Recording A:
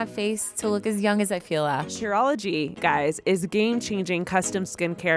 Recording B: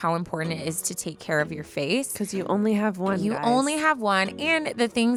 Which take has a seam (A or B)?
A